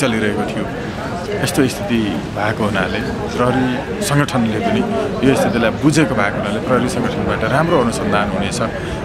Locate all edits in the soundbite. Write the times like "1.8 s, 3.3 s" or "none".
none